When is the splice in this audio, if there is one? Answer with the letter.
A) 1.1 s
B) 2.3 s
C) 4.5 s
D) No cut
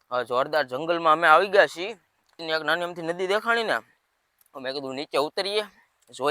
B